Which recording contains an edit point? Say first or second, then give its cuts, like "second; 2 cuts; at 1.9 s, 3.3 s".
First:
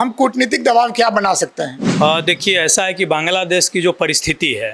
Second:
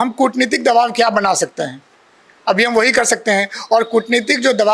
first; 1 cut; at 1.8 s